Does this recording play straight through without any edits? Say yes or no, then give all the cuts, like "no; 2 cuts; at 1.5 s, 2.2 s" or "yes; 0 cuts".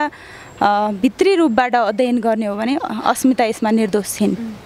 yes; 0 cuts